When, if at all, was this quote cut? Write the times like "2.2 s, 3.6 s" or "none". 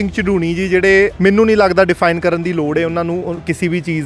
1.1 s